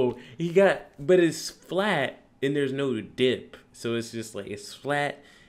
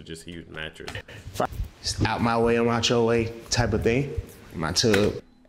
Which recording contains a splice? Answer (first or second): second